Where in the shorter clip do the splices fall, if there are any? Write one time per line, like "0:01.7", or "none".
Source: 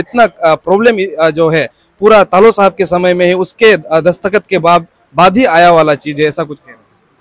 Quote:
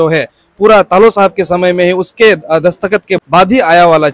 0:03.2